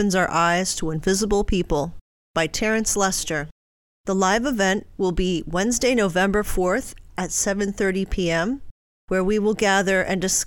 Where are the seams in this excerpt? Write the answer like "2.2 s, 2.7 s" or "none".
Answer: none